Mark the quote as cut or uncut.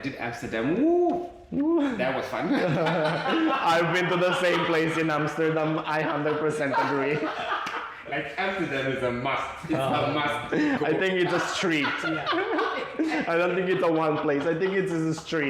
uncut